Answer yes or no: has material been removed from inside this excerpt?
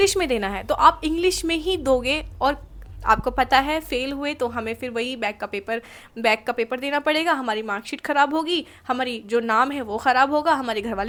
no